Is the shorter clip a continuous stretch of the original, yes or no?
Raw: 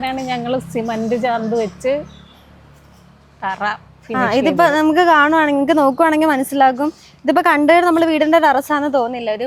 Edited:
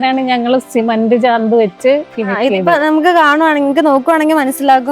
no